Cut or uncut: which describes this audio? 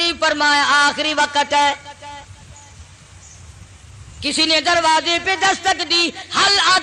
uncut